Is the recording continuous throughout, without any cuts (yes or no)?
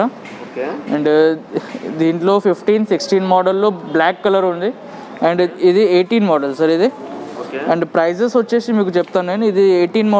yes